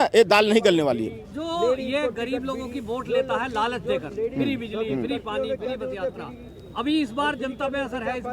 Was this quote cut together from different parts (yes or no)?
no